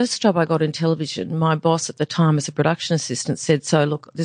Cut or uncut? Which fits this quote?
uncut